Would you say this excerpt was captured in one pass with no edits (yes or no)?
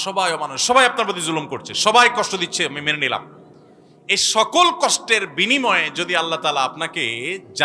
yes